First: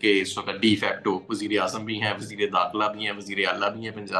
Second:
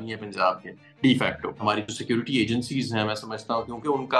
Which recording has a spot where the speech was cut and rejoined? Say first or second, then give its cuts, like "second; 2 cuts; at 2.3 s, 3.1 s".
second; 1 cut; at 1.6 s